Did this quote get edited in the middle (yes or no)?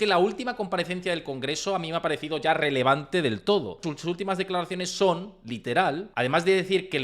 yes